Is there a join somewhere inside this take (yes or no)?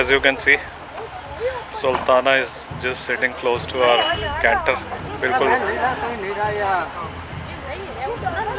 no